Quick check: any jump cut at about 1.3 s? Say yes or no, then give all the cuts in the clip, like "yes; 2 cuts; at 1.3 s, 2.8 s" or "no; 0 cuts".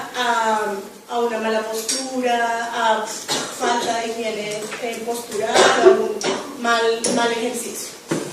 yes; 1 cut; at 1.3 s